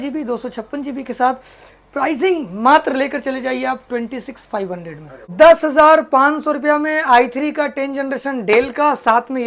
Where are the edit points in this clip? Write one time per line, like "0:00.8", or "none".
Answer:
0:05.3